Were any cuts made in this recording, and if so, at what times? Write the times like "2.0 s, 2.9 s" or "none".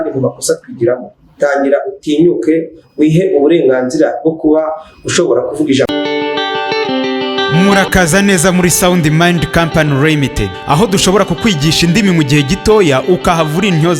5.9 s